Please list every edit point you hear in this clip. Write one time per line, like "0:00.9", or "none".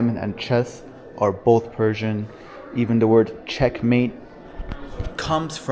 none

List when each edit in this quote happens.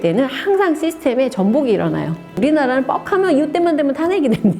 0:02.4

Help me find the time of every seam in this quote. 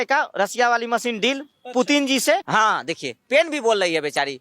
0:02.4

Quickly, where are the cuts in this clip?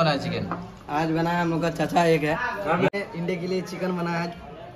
0:02.9

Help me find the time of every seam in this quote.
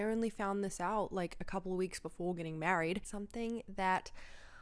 0:03.1

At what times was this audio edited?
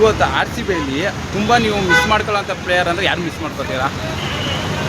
none

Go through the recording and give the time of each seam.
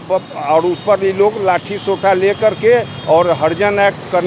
none

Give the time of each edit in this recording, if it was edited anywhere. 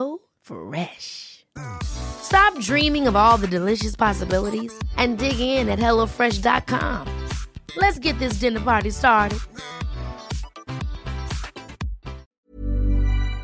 0:12.3

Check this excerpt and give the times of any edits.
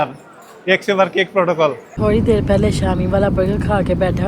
0:02.0

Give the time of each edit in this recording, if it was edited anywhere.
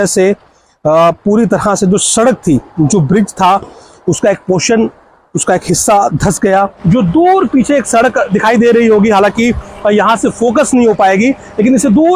0:06.7

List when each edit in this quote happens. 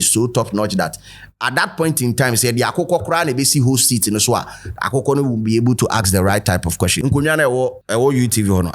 0:06.9
0:07.8

